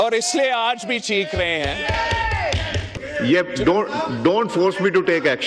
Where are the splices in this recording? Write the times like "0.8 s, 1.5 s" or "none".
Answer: 3.0 s

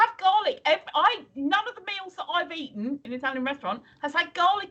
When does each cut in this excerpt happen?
3.0 s

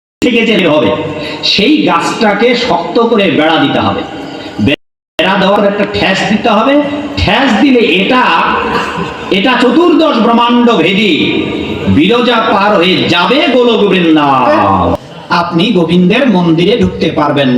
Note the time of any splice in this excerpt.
14.7 s

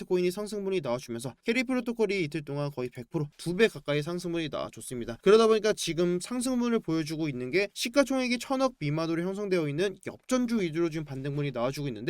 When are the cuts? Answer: 1.3 s

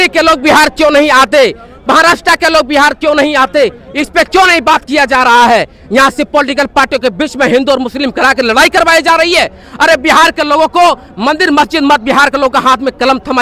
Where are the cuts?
none

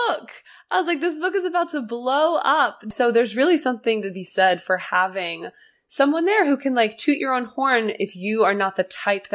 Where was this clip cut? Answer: 2.9 s

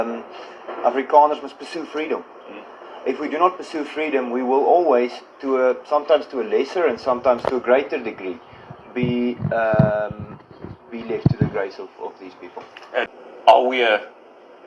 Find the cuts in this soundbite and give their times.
13.1 s

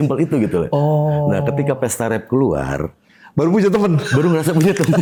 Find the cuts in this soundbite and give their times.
none

